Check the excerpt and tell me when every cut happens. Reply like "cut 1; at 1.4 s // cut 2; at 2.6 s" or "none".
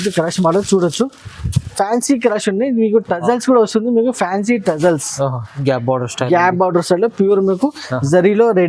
none